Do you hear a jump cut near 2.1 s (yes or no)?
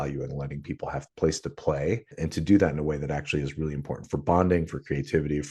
yes